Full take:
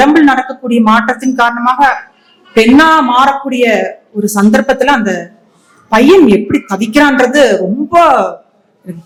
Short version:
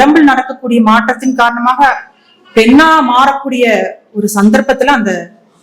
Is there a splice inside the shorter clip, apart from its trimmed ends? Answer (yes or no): no